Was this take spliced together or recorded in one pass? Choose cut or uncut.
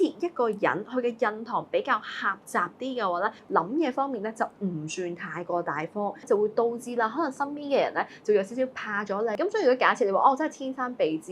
cut